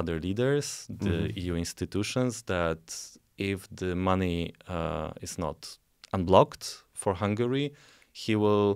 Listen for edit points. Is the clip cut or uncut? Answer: uncut